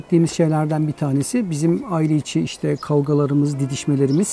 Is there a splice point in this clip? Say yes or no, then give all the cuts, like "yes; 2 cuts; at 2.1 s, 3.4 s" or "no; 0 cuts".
no; 0 cuts